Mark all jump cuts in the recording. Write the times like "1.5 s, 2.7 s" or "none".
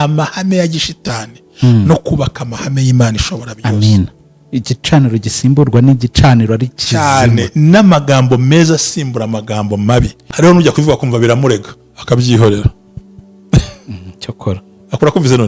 10.2 s